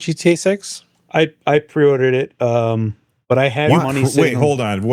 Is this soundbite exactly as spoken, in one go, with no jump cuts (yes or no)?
yes